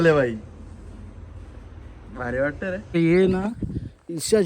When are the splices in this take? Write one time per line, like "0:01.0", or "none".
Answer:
0:02.8